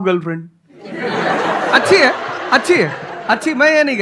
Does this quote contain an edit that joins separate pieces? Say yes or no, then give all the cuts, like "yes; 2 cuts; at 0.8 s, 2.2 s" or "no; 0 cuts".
no; 0 cuts